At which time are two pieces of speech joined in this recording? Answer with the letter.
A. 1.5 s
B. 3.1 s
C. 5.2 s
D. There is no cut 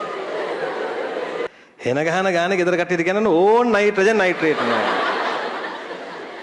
A